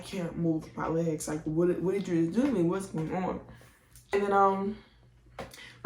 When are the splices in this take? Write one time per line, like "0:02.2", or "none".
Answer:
0:04.1